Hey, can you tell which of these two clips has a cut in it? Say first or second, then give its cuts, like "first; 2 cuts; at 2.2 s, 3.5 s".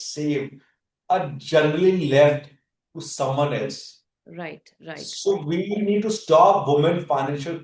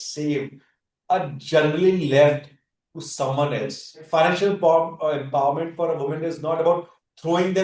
second; 1 cut; at 4.0 s